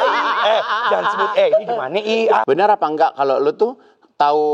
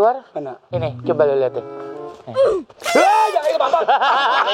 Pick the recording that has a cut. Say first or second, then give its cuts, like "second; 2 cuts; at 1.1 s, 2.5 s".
first; 1 cut; at 2.4 s